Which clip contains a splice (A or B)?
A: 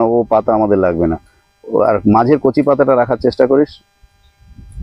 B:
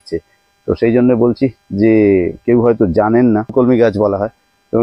B